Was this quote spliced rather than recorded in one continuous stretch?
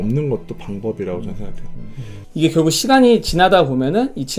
yes; 1 cut; at 2.2 s

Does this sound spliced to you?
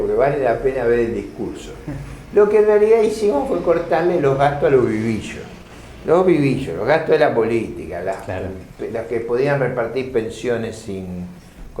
no; 0 cuts

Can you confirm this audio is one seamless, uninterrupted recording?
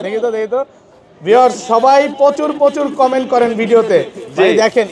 yes; 0 cuts

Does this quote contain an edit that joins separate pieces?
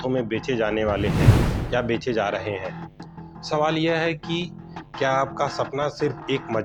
no; 0 cuts

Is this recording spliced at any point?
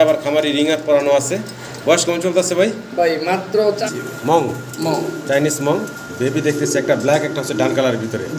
yes; 1 cut; at 3.8 s

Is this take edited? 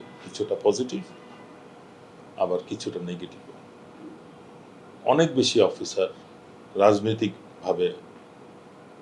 no; 0 cuts

